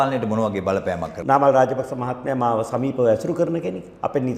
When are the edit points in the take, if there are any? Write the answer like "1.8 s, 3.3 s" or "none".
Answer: 1.1 s